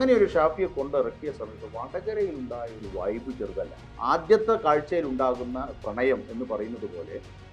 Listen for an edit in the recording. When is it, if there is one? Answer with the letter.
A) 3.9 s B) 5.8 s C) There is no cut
A